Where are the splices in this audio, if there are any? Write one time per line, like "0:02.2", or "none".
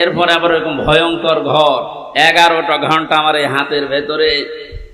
0:02.0